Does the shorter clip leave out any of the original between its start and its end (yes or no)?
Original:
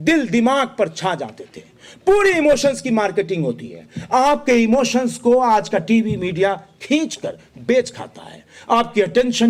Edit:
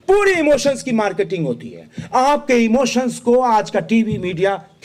no